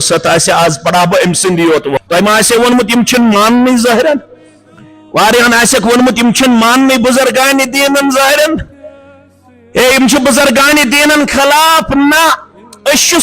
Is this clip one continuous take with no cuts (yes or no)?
no